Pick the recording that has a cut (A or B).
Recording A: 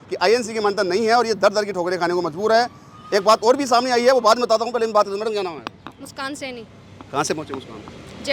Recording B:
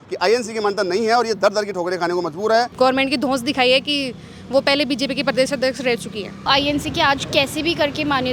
B